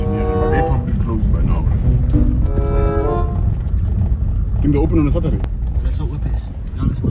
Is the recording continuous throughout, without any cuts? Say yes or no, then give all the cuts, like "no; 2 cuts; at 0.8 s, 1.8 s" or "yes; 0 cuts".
no; 1 cut; at 5.4 s